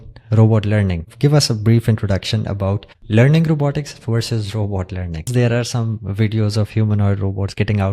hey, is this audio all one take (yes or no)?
no